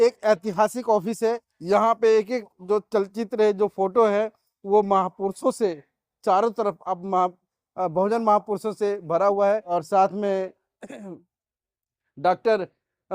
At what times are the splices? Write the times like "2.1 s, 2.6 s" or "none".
1.5 s, 9.7 s